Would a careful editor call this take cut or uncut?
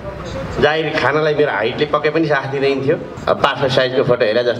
cut